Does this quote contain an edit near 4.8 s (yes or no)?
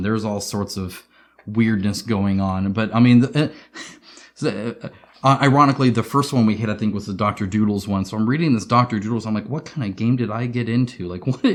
no